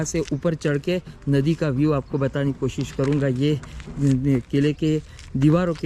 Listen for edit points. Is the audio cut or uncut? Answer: uncut